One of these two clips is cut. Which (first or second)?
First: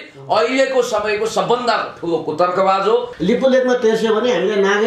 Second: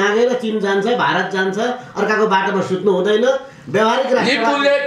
first